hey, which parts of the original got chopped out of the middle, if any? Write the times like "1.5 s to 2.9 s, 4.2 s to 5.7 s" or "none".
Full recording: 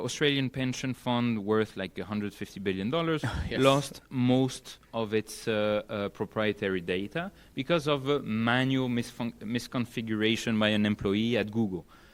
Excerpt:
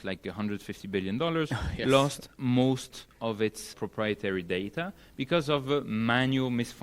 5.4 s to 6.1 s